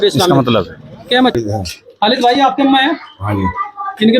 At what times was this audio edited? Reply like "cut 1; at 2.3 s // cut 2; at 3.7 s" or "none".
cut 1; at 1.3 s